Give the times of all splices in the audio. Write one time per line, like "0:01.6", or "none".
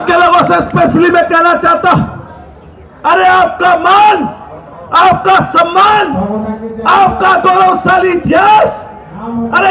none

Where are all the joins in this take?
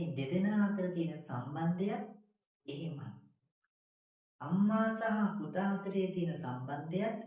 none

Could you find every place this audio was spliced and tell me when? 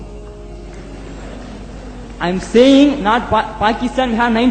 none

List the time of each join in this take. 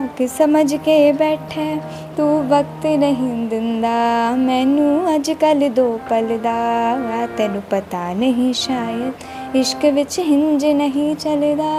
none

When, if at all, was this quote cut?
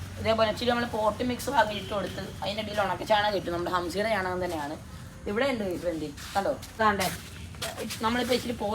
0:06.8

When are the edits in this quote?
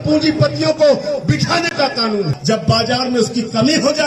0:02.3

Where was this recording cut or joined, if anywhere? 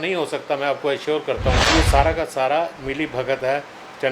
0:01.7

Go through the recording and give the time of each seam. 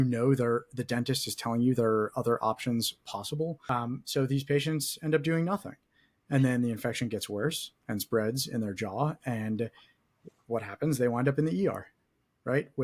none

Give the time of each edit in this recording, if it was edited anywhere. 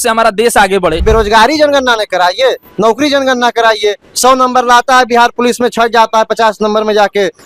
0:01.0

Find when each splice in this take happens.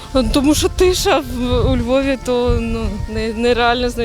none

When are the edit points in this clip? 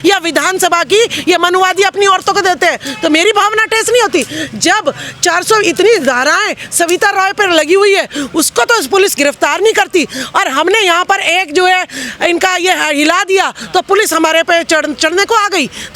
none

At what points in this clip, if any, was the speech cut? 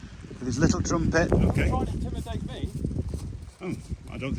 0:01.3

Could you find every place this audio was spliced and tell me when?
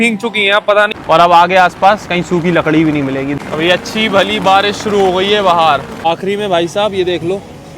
0:00.9
0:03.3
0:06.0

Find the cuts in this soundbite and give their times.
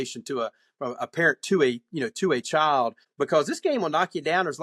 0:03.0

